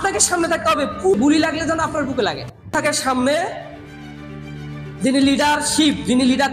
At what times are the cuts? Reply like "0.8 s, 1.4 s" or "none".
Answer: 1.1 s, 2.8 s